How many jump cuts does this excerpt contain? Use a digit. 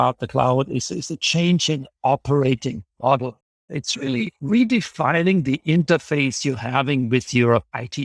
0